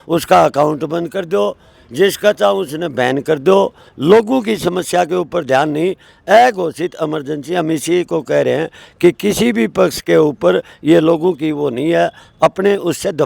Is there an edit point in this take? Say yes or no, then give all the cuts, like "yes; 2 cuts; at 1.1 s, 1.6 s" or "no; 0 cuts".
no; 0 cuts